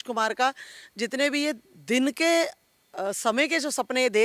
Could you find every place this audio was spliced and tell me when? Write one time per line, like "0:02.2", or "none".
none